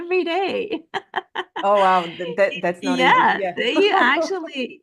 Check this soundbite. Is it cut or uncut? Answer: uncut